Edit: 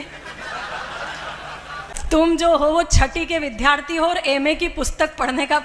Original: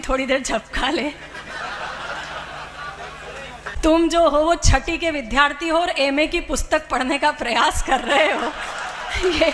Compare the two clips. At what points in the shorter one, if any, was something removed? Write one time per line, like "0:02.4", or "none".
0:02.0